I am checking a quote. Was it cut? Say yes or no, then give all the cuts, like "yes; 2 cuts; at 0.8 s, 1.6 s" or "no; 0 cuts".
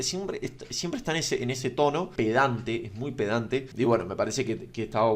yes; 2 cuts; at 2.1 s, 3.7 s